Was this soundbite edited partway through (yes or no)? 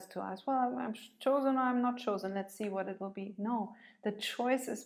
no